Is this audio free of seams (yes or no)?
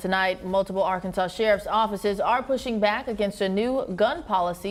yes